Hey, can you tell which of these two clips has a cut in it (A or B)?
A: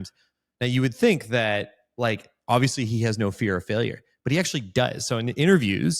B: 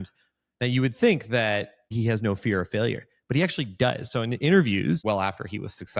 B